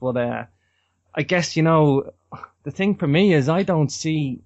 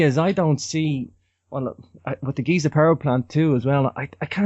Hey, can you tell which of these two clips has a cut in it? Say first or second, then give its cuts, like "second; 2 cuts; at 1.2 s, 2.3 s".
second; 1 cut; at 3.3 s